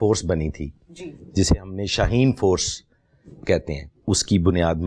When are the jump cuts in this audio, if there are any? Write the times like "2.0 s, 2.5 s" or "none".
3.9 s